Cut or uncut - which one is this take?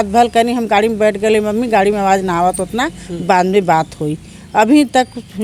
uncut